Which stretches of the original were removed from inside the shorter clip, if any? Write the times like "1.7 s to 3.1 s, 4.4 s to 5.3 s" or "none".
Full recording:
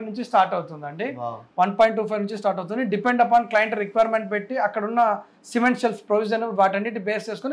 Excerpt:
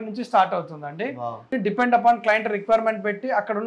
1.4 s to 2.7 s

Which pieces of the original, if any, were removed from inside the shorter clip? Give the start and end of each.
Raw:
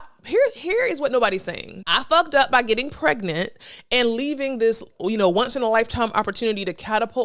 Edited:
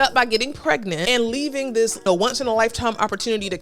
3.4 s to 3.9 s, 4.9 s to 5.2 s

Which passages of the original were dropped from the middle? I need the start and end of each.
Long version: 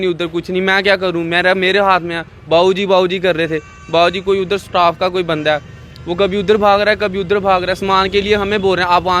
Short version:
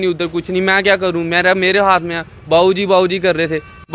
none

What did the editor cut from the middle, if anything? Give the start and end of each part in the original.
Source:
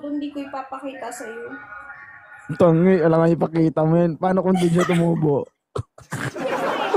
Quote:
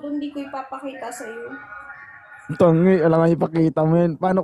none

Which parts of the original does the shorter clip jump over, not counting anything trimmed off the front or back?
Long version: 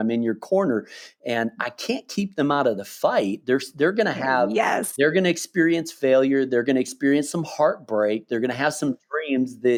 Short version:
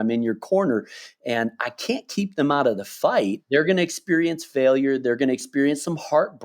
3.4 s to 4.9 s

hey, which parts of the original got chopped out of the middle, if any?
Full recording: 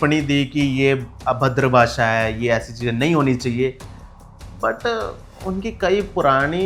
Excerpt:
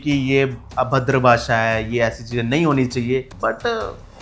3.8 s to 4.5 s

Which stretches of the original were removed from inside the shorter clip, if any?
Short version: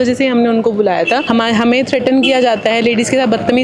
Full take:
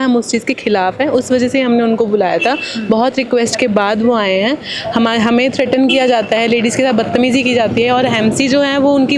2.6 s to 4.9 s

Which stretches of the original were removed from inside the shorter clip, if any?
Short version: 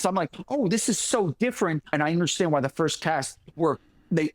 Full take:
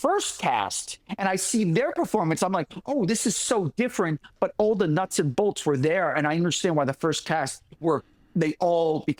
4.3 s to 6.1 s

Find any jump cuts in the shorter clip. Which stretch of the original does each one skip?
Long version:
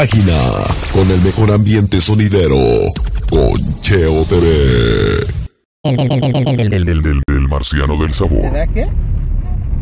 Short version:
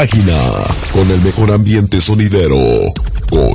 none

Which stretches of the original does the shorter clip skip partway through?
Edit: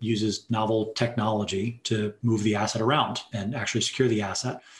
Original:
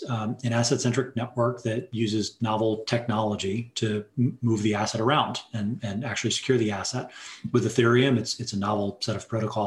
4.1 s to 4.4 s, 5.5 s to 5.8 s

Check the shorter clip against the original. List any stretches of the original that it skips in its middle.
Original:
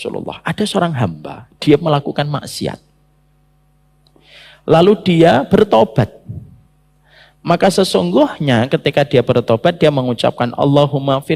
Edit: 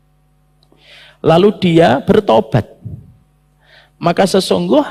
none

